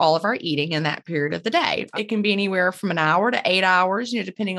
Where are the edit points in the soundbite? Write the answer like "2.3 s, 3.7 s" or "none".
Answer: 1.9 s